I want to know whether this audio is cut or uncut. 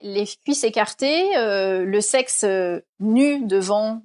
uncut